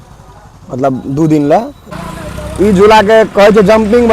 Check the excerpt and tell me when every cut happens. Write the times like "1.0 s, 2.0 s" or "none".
1.8 s

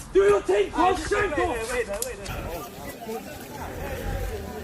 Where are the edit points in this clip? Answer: 2.2 s

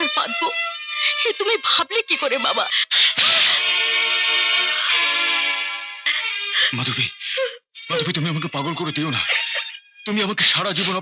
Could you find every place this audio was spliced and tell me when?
2.9 s, 6.1 s

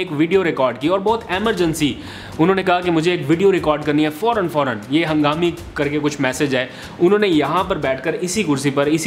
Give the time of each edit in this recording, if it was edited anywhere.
none

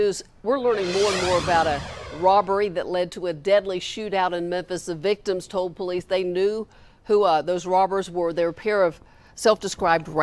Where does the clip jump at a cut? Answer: none

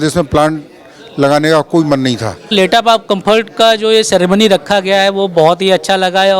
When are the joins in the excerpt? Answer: 2.5 s

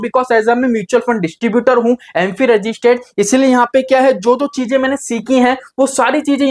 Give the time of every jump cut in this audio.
none

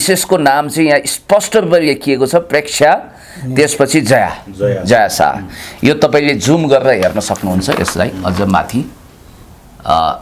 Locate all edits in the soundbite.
none

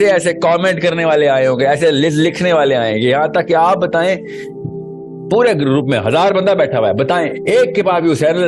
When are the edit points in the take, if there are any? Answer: none

